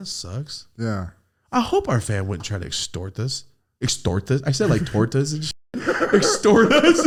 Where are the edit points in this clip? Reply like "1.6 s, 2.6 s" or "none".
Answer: none